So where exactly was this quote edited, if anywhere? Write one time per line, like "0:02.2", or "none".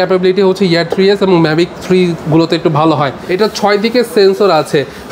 0:03.2